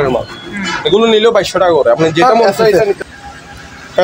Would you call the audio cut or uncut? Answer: cut